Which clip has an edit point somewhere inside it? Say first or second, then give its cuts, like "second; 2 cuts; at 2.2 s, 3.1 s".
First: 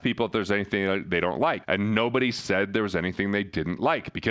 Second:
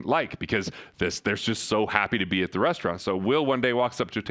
first; 1 cut; at 1.6 s